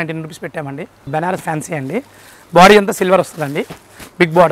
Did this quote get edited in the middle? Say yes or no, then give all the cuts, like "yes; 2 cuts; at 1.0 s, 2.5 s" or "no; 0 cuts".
yes; 1 cut; at 1.1 s